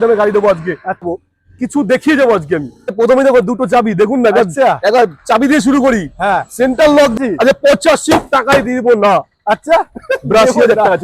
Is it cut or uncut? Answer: cut